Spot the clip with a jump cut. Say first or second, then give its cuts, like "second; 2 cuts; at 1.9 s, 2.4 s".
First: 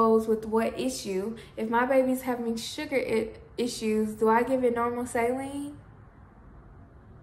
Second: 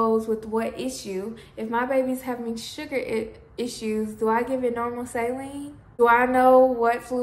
second; 1 cut; at 6.0 s